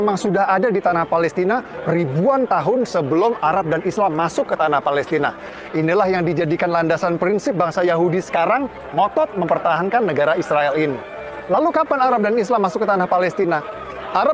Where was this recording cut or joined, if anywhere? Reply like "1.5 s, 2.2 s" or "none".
none